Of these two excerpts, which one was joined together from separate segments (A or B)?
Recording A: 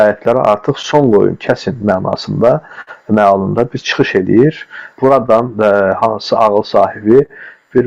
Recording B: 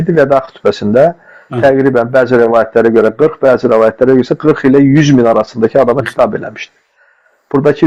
A